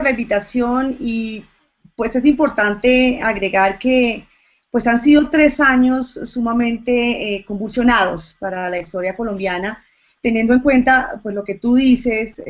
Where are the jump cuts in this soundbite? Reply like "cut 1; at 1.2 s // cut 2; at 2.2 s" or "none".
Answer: cut 1; at 9.9 s